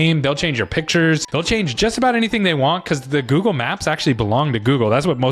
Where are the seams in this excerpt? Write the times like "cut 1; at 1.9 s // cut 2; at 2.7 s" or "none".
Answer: cut 1; at 1.3 s